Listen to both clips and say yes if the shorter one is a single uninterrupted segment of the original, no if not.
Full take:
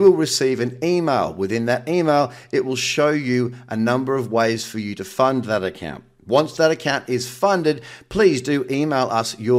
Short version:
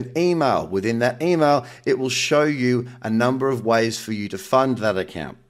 yes